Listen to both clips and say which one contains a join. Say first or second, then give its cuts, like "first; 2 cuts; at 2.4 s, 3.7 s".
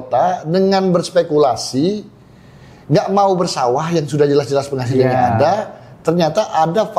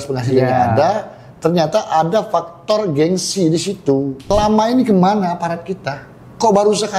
second; 1 cut; at 4.3 s